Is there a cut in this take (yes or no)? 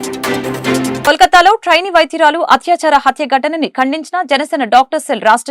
yes